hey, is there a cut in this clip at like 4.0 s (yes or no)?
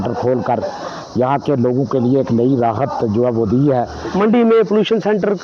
yes